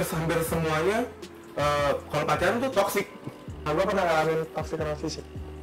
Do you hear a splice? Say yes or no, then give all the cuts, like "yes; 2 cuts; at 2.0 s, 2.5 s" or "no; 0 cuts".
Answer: no; 0 cuts